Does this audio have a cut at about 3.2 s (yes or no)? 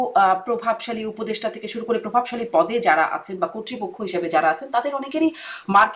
no